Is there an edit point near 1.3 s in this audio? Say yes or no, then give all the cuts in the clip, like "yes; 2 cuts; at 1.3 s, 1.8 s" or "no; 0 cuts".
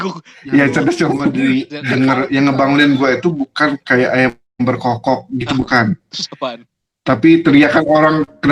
yes; 1 cut; at 1.3 s